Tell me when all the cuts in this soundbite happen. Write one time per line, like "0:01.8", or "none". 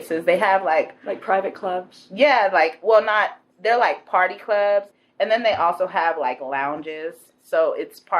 0:04.9